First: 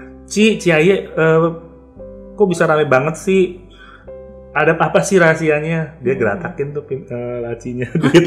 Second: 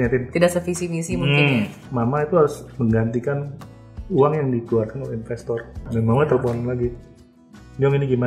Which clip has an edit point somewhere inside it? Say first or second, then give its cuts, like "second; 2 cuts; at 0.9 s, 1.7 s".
second; 2 cuts; at 1.8 s, 5.8 s